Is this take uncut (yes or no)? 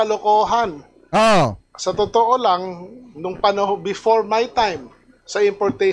yes